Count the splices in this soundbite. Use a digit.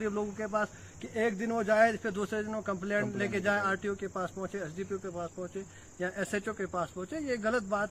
0